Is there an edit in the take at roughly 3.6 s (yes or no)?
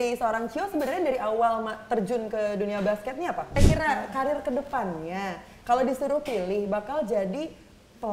yes